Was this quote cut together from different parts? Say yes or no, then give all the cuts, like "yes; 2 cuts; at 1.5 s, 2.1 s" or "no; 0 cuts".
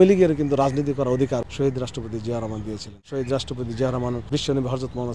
yes; 3 cuts; at 1.4 s, 3.0 s, 4.2 s